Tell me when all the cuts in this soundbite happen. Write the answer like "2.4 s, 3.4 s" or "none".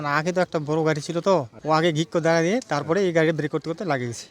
1.5 s